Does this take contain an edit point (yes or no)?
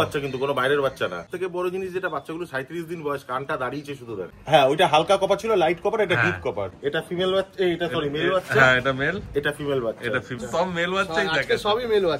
yes